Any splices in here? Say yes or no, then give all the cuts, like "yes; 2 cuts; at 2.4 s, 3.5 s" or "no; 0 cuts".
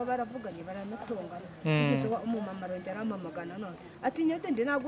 no; 0 cuts